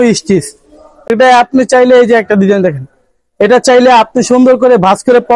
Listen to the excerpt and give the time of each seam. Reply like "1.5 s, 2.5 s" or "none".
1.1 s